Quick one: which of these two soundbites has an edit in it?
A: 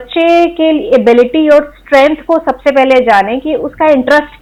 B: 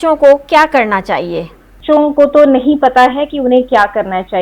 B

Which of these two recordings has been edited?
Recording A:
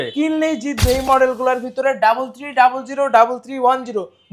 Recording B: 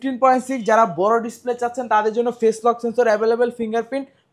A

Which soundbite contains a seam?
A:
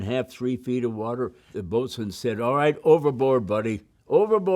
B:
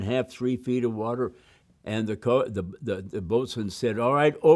A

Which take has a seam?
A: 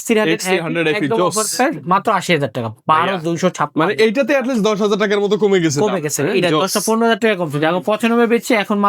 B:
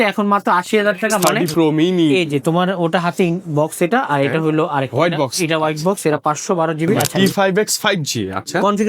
B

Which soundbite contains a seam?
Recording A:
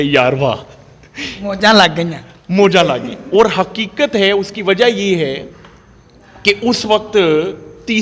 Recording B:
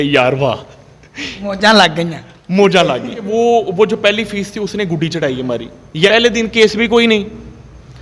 B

